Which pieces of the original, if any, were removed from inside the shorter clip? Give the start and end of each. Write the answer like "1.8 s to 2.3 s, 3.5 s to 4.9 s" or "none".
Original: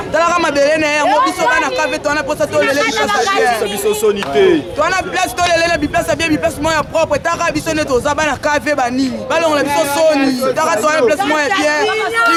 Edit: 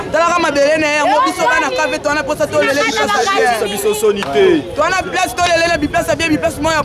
none